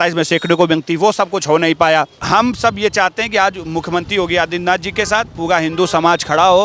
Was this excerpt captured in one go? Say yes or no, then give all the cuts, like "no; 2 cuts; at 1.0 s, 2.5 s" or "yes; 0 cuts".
no; 1 cut; at 2.2 s